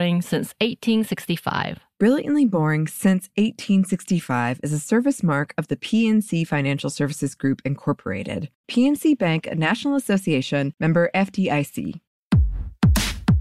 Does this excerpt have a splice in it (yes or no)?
yes